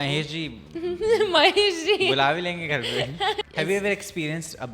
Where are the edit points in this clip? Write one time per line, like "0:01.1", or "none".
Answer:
0:03.5

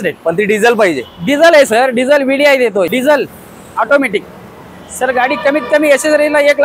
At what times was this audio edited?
0:02.9

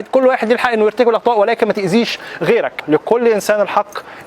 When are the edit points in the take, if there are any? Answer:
0:02.8

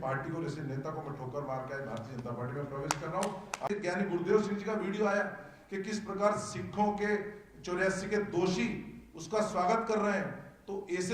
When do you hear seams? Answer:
0:03.7

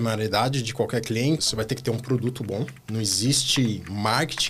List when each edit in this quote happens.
0:01.4
0:02.8

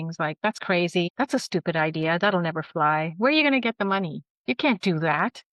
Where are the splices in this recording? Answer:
0:01.1

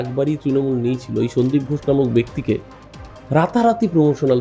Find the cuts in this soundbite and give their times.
none

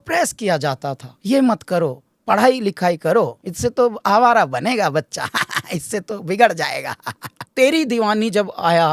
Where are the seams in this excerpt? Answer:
0:01.1
0:03.4
0:07.4

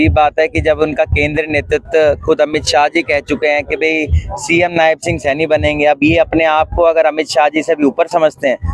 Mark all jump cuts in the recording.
none

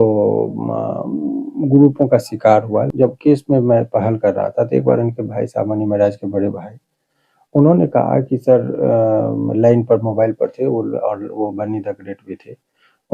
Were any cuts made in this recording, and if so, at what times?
0:02.9

